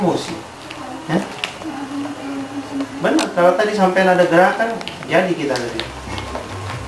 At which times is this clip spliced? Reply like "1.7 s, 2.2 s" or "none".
none